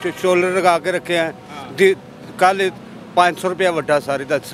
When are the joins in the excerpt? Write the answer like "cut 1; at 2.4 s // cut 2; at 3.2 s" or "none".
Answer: none